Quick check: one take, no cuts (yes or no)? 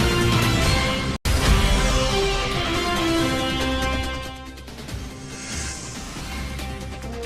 no